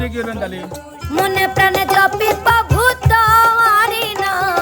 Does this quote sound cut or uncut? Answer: cut